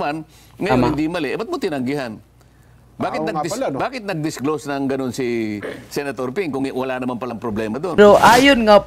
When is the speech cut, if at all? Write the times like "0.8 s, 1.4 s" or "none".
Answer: 8.0 s